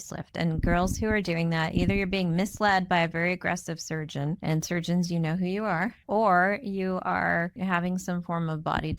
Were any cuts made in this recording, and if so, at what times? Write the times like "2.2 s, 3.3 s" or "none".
4.4 s, 6.0 s, 7.5 s